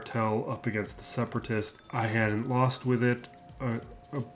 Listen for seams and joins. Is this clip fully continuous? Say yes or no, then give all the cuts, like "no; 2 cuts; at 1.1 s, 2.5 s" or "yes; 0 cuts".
no; 1 cut; at 1.8 s